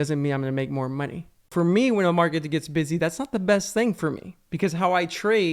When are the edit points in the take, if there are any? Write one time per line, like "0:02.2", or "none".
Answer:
0:01.5